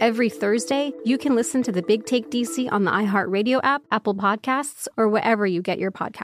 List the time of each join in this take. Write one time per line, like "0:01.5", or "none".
0:00.9
0:03.8